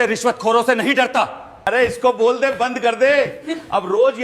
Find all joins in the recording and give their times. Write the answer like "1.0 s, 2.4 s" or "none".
1.7 s